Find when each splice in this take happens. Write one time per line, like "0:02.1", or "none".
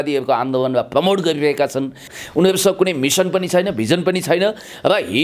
0:02.1